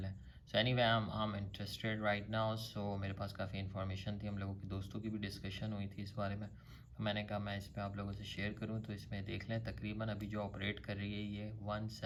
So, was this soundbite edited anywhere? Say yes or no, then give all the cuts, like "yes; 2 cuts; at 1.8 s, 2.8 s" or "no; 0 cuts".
no; 0 cuts